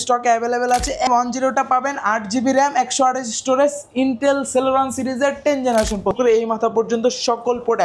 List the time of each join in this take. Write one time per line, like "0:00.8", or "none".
0:01.1
0:06.1